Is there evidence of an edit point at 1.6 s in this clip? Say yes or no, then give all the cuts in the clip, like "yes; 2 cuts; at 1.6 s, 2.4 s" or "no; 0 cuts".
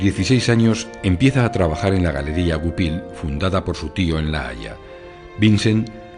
no; 0 cuts